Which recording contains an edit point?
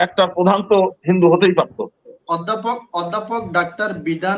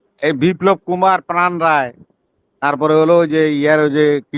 first; 1 cut; at 2.2 s

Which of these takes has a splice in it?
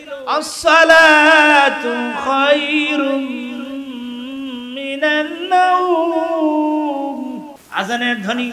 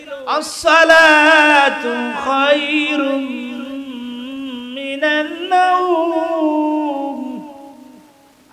first; 1 cut; at 7.6 s

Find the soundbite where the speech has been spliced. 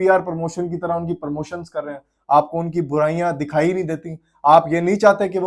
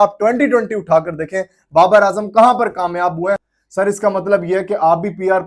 second; 1 cut; at 3.6 s

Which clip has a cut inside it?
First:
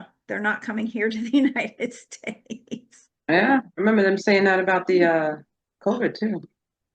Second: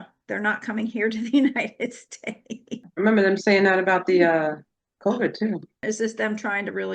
second; 2 cuts; at 2.9 s, 5.8 s

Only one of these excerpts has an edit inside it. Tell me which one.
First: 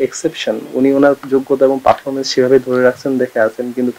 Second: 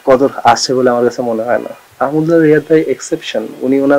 second; 1 cut; at 1.8 s

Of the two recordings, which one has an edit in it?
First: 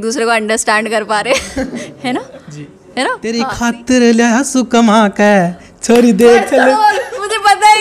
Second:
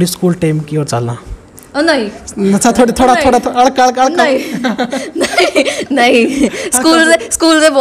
first; 1 cut; at 3.4 s

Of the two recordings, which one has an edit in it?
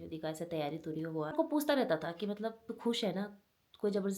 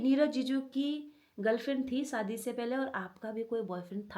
first; 1 cut; at 1.3 s

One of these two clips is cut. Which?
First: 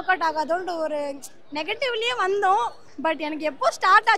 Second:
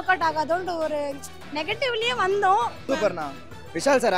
second; 1 cut; at 2.9 s

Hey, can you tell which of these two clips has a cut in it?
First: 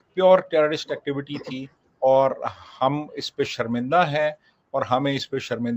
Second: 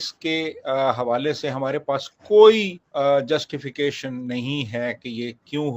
second; 1 cut; at 2.8 s

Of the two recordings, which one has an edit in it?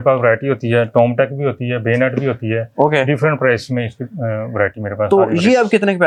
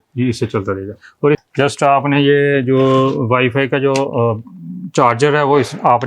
second; 1 cut; at 1.4 s

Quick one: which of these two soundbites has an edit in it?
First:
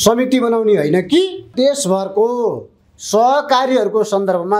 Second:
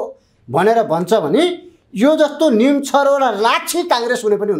first; 1 cut; at 1.5 s

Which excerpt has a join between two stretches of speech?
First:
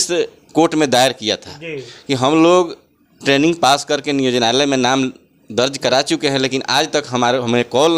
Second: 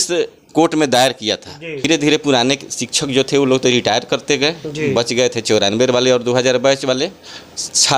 second; 1 cut; at 1.9 s

